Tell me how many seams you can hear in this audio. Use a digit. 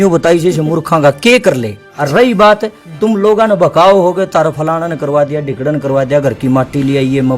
1